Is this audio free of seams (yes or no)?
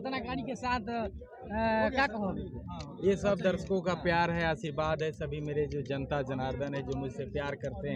yes